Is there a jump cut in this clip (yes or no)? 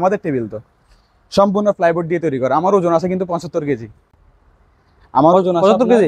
no